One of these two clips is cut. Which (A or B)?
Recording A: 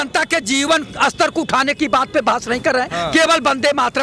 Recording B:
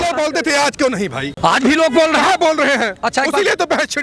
B